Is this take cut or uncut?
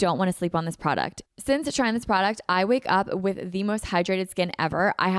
cut